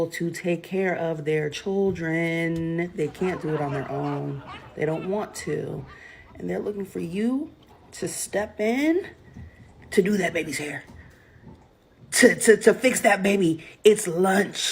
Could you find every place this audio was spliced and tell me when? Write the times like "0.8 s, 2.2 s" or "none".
2.9 s, 11.0 s

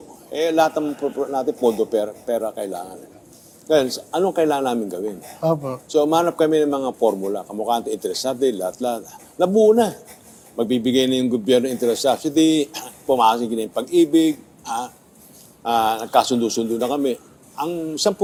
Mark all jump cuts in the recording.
none

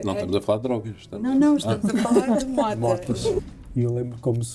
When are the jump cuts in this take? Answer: 3.4 s

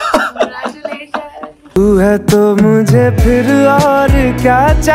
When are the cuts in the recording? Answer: 1.7 s

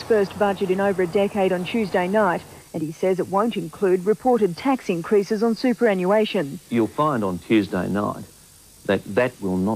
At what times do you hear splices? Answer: 2.7 s

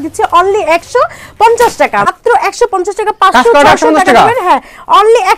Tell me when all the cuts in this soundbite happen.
2.1 s

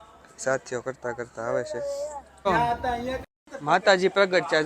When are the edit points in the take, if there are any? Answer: 2.3 s

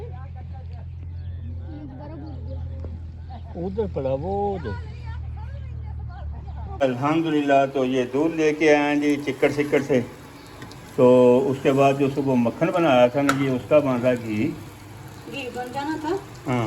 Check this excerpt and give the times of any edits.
none

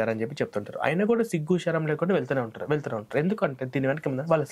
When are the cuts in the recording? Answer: none

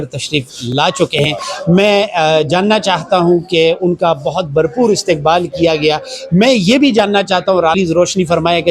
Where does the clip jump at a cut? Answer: 7.7 s

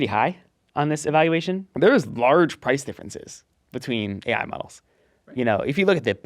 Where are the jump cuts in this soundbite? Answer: 1.7 s

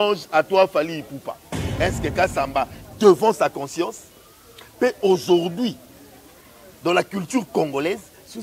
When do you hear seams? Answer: 1.6 s

